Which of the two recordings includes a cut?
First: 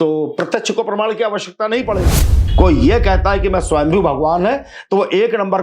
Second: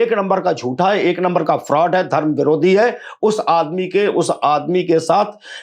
first; 1 cut; at 2.3 s

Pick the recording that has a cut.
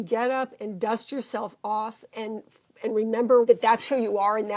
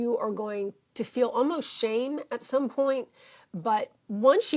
first; 1 cut; at 3.5 s

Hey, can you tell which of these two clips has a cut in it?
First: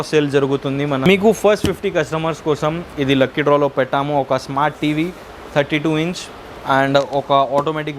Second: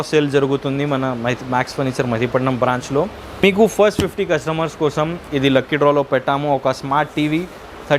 first; 2 cuts; at 1.0 s, 6.6 s

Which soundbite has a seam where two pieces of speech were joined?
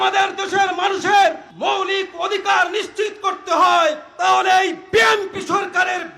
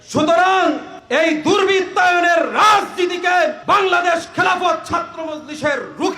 second; 2 cuts; at 0.9 s, 3.6 s

